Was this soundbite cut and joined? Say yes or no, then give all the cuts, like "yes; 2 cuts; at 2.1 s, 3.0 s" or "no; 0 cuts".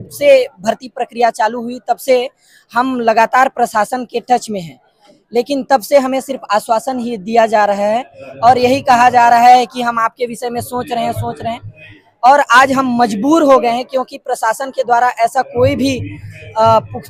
no; 0 cuts